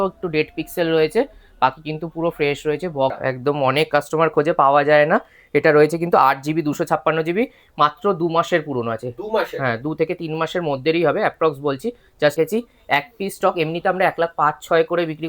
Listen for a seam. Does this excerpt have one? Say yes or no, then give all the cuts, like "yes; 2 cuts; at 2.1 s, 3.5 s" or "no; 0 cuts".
yes; 2 cuts; at 3.2 s, 12.4 s